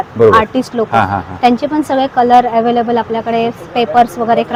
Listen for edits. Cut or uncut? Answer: uncut